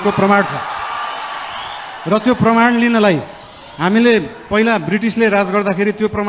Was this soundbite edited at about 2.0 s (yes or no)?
no